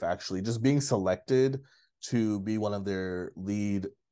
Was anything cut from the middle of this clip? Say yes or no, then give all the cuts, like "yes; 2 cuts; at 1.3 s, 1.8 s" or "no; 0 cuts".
no; 0 cuts